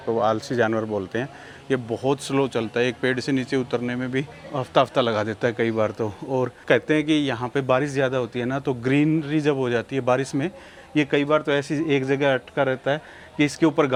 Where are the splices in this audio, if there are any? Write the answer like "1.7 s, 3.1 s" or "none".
none